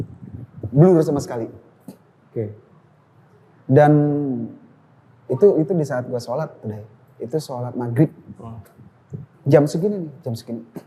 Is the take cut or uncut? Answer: uncut